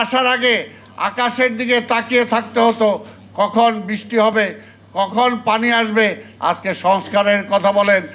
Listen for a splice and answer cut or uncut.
cut